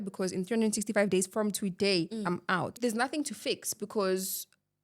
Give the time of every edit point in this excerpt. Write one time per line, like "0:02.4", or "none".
0:02.8

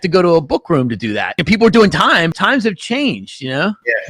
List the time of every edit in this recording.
0:01.4
0:02.3

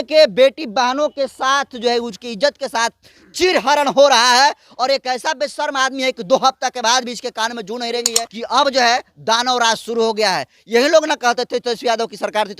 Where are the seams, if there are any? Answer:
0:08.2

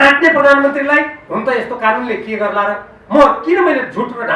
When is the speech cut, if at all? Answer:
none

